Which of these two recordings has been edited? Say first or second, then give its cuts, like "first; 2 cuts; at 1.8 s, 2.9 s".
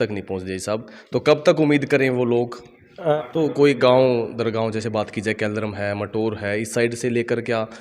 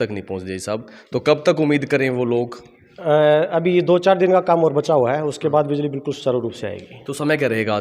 first; 1 cut; at 3.1 s